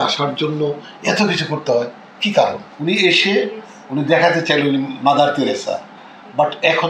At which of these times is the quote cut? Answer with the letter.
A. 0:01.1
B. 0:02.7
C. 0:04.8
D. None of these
B